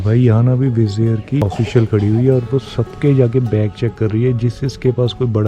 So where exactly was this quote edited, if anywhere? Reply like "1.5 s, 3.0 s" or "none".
1.4 s